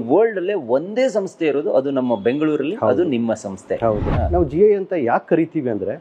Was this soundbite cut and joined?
yes; 1 cut; at 4.1 s

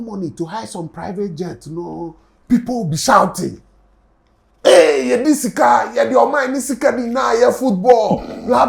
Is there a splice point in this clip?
no; 0 cuts

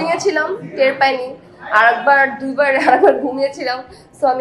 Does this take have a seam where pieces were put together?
no; 0 cuts

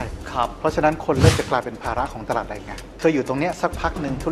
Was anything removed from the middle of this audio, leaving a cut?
yes; 1 cut; at 2.8 s

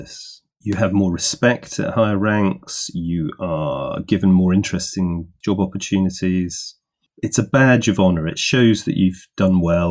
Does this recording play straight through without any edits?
yes; 0 cuts

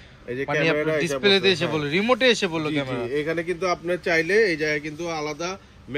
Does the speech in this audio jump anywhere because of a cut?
no; 0 cuts

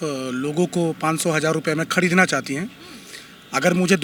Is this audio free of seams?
yes; 0 cuts

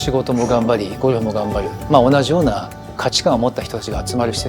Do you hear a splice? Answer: yes; 1 cut; at 2.9 s

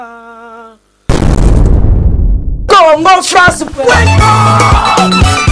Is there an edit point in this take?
yes; 1 cut; at 0.9 s

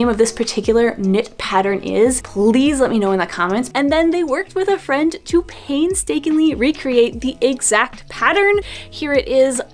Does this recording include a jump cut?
yes; 2 cuts; at 3.7 s, 8.8 s

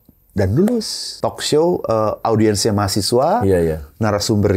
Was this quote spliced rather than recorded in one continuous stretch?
yes; 1 cut; at 1.0 s

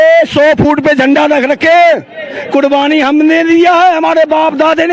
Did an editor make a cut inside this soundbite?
no; 0 cuts

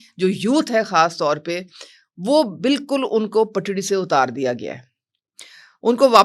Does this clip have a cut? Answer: no; 0 cuts

